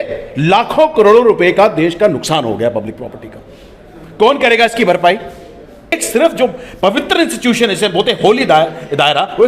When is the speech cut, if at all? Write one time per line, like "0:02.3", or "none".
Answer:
0:06.0